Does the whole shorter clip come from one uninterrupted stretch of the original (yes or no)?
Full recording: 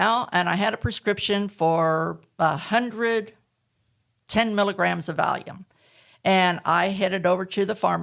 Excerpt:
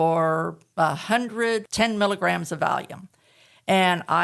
no